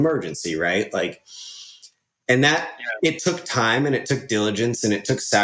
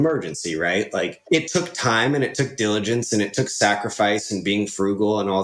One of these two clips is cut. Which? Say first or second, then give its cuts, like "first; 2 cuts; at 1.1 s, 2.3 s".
second; 1 cut; at 1.2 s